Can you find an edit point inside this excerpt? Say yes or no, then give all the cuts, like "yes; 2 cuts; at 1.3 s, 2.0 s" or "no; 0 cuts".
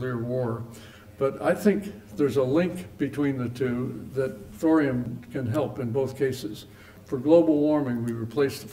yes; 3 cuts; at 4.4 s, 5.2 s, 6.9 s